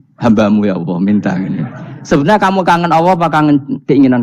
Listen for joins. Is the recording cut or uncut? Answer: uncut